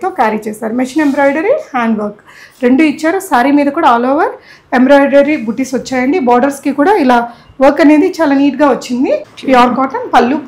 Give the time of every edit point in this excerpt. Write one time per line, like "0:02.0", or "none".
0:09.3